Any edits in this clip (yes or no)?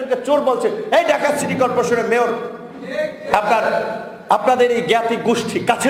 no